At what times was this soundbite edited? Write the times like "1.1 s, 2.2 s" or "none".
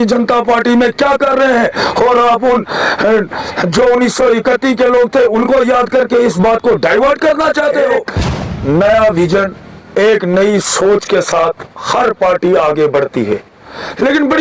8.1 s